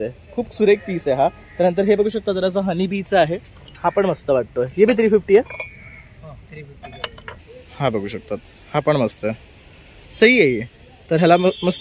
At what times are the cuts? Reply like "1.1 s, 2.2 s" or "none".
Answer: 7.4 s